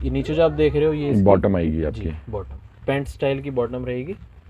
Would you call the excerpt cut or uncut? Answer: uncut